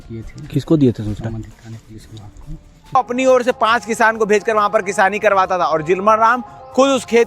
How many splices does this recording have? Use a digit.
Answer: 1